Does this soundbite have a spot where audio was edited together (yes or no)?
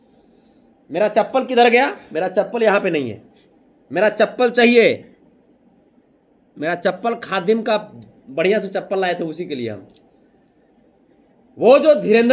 no